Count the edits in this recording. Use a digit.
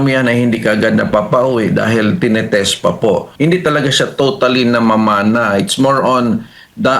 1